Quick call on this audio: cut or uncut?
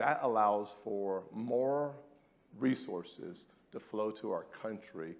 uncut